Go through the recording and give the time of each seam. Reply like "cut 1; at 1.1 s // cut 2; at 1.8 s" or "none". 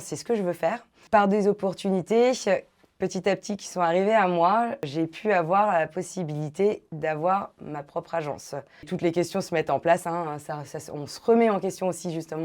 cut 1; at 1.0 s // cut 2; at 4.9 s // cut 3; at 8.9 s